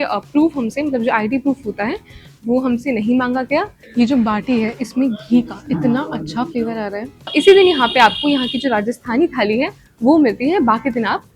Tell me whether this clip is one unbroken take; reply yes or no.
no